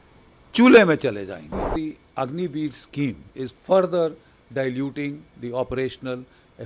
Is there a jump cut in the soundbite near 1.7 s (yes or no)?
yes